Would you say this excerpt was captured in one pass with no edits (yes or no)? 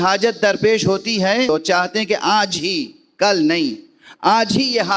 no